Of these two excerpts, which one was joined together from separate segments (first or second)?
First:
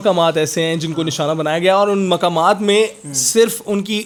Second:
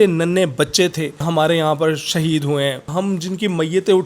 second